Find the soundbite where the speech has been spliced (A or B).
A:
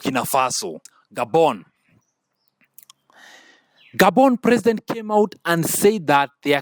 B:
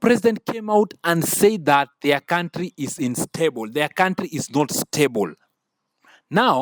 A